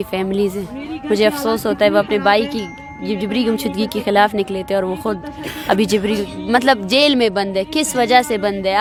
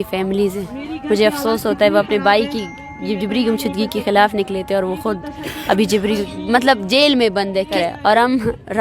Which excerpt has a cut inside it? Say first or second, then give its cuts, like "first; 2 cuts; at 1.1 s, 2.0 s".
second; 1 cut; at 7.7 s